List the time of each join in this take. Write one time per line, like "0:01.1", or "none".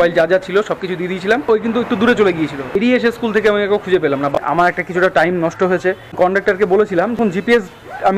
0:01.5
0:02.8
0:04.3
0:07.2